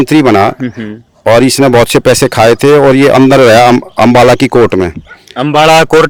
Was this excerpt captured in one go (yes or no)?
yes